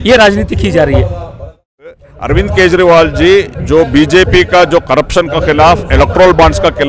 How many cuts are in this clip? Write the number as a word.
one